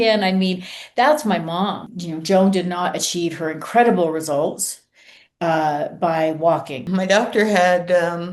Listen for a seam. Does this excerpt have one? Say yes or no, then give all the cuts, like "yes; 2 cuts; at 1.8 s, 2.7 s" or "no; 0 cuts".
yes; 2 cuts; at 1.9 s, 6.9 s